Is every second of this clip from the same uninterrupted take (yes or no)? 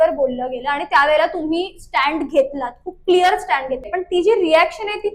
no